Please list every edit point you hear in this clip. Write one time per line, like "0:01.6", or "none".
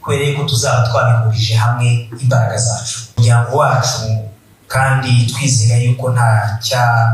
0:03.2